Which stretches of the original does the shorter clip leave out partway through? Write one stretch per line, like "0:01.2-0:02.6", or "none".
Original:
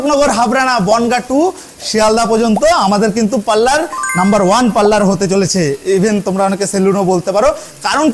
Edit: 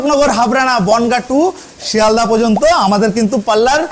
none